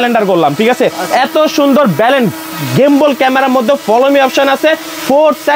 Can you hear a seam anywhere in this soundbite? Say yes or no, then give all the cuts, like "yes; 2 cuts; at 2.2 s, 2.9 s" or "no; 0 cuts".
no; 0 cuts